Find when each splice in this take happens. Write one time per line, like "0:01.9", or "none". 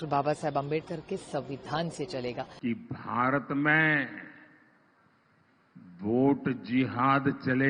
0:02.5